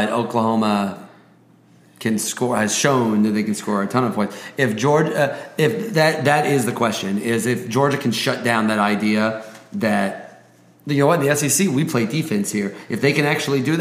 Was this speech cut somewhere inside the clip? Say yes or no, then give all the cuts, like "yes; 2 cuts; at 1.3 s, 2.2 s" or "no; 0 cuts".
no; 0 cuts